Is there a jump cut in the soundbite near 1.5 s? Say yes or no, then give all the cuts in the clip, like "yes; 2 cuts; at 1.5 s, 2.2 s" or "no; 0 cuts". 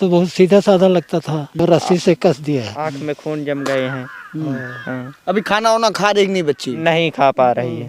yes; 1 cut; at 1.5 s